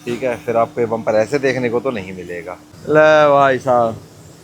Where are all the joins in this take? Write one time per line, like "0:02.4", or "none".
0:02.7